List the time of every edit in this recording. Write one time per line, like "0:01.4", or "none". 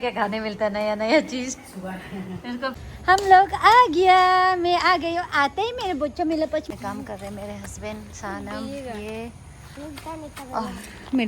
0:02.7
0:06.7